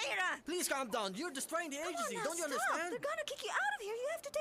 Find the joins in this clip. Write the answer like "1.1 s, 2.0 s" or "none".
2.2 s